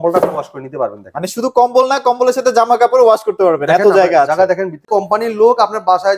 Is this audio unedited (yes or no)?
no